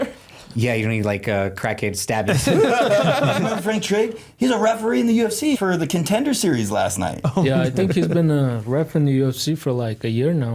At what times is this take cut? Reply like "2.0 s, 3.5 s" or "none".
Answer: 3.6 s, 5.6 s

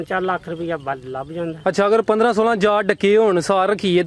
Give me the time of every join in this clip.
none

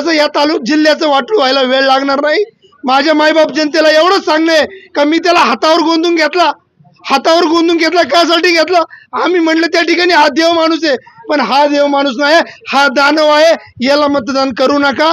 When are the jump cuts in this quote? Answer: none

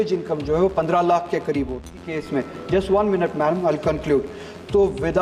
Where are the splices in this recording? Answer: 2.0 s

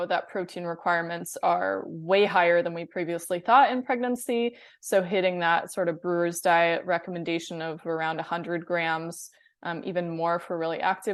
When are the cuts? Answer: none

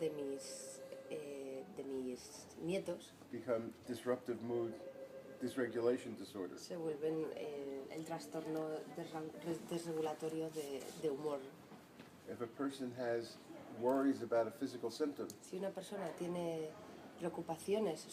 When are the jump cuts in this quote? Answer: 2.8 s

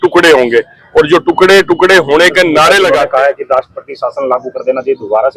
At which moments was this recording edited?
2.9 s

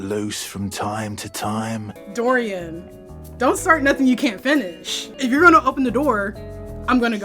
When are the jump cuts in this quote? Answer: 2.0 s

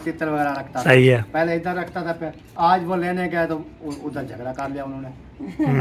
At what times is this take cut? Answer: none

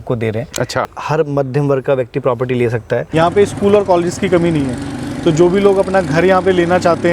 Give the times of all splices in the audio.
3.0 s

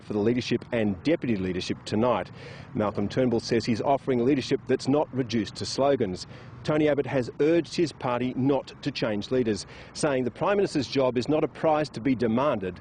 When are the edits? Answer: 2.3 s

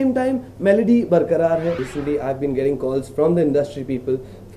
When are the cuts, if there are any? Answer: 1.9 s

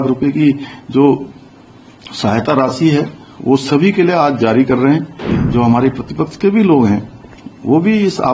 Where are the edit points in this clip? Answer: 5.4 s

